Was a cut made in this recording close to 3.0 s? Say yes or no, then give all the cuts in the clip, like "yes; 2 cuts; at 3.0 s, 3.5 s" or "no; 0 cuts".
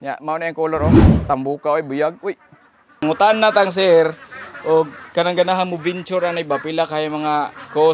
yes; 1 cut; at 3.0 s